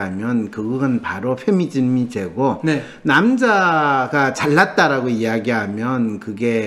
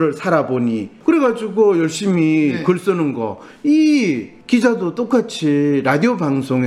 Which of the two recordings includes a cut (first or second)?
second